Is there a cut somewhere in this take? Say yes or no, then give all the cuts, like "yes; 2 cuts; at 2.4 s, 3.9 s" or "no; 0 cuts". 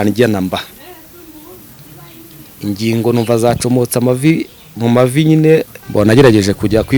yes; 1 cut; at 5.8 s